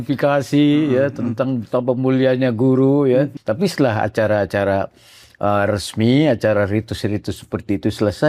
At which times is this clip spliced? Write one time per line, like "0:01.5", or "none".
0:03.4